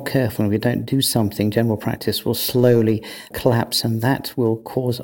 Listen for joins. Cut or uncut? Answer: cut